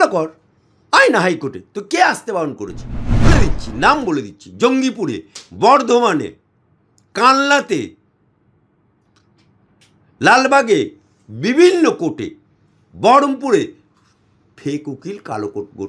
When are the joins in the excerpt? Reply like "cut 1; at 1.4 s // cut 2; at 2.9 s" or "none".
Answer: cut 1; at 3.3 s